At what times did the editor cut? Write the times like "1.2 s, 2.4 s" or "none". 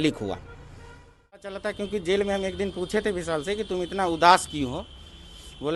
1.6 s